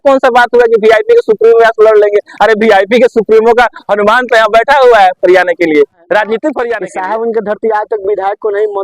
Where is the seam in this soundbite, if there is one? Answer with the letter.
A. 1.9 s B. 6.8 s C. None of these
B